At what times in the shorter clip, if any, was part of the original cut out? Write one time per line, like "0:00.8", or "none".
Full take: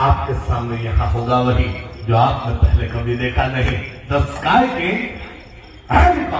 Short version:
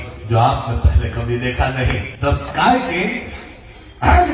0:02.1